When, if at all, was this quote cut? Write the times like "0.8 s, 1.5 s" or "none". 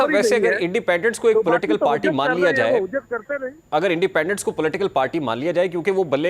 none